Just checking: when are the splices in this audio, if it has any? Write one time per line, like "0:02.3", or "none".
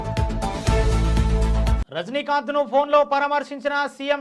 0:01.8